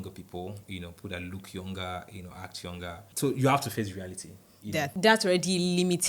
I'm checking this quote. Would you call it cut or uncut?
cut